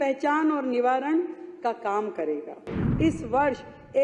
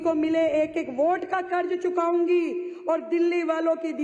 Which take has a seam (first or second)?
first